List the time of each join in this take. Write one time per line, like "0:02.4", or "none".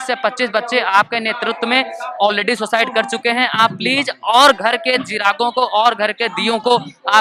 none